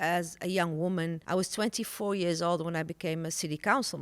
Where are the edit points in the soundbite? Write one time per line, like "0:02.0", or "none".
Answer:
0:01.2